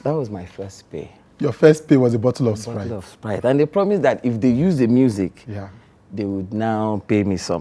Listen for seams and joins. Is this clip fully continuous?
yes; 0 cuts

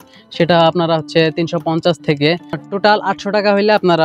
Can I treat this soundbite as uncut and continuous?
no; 1 cut; at 2.6 s

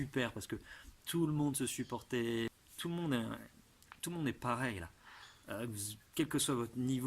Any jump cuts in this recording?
yes; 1 cut; at 2.5 s

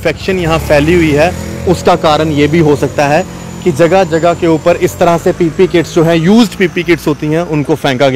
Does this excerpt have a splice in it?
no; 0 cuts

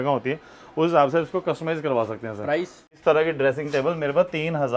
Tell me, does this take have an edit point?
yes; 1 cut; at 2.9 s

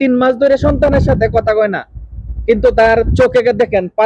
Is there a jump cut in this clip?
no; 0 cuts

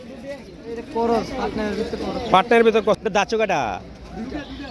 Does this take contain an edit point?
yes; 1 cut; at 2.8 s

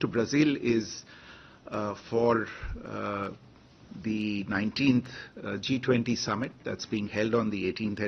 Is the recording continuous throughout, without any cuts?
yes; 0 cuts

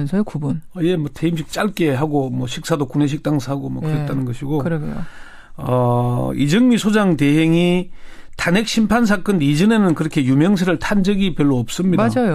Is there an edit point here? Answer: no; 0 cuts

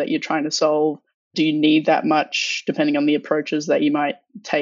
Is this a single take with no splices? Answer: yes; 0 cuts

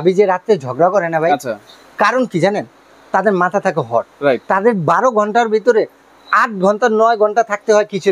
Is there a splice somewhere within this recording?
no; 0 cuts

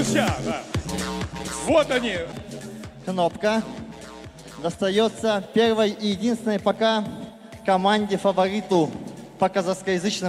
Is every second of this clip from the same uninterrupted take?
no; 1 cut; at 2.3 s

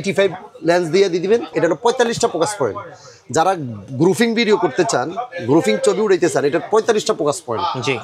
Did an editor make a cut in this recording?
yes; 1 cut; at 1.5 s

